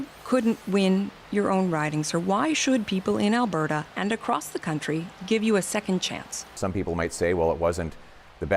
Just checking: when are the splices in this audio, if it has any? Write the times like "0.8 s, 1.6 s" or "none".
6.6 s